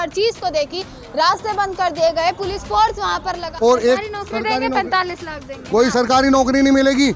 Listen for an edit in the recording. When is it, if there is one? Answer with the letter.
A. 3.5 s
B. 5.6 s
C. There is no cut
A